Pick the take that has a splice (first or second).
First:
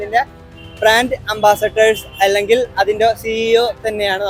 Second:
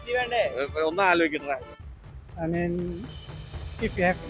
second